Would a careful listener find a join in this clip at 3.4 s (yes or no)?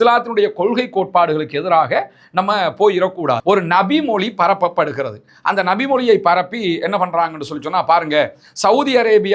yes